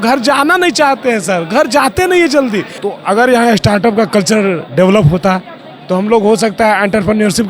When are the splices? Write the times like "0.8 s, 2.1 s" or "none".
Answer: 2.8 s